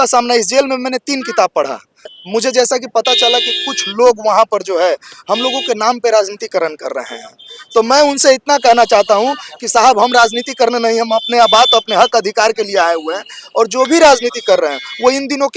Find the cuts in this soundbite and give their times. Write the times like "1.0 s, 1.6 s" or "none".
2.1 s